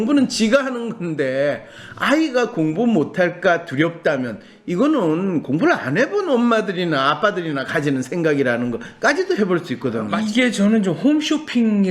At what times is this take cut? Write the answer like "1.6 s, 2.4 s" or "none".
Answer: 10.1 s